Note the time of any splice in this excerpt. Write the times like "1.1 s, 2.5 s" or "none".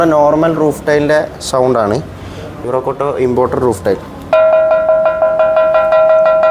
2.6 s